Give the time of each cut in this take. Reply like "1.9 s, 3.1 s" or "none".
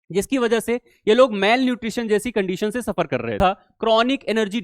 3.4 s